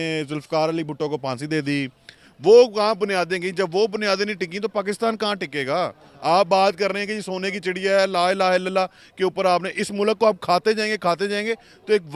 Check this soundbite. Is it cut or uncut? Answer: cut